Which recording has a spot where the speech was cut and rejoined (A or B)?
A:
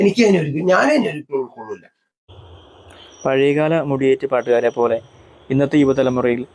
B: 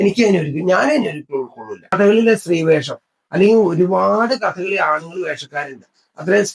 B